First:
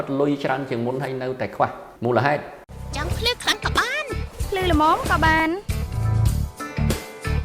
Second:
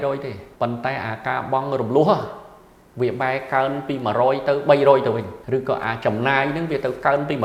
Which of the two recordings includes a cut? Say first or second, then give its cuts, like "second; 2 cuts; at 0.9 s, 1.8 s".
first; 1 cut; at 2.6 s